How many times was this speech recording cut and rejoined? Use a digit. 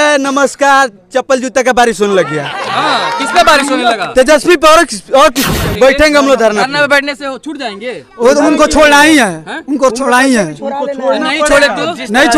1